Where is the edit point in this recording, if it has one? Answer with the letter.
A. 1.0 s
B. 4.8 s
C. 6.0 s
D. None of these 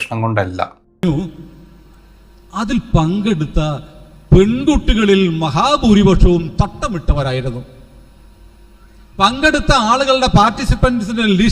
A